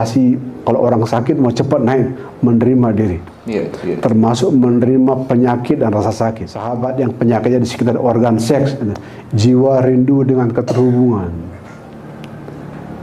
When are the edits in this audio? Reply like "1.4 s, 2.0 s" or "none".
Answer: 6.7 s

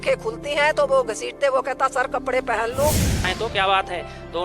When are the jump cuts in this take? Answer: 3.2 s

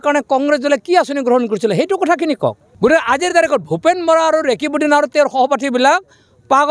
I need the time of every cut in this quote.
2.6 s

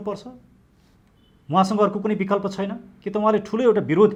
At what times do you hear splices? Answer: none

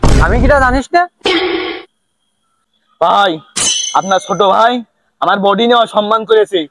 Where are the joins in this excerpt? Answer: none

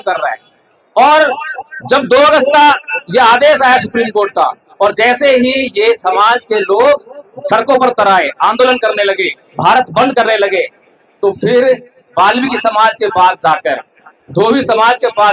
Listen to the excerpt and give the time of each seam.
none

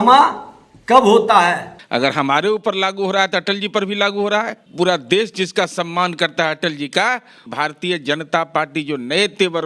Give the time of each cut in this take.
1.8 s, 4.6 s, 7.4 s

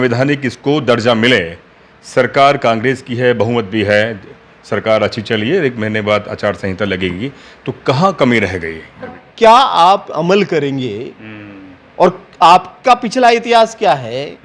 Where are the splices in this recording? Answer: 9.2 s

